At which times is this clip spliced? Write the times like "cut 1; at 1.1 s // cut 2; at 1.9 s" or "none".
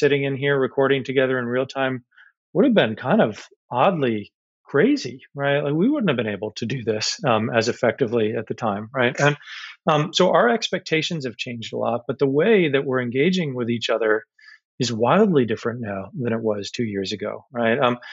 none